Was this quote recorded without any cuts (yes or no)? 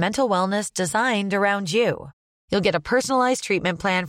yes